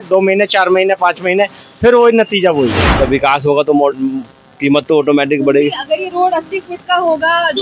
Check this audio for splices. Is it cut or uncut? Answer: cut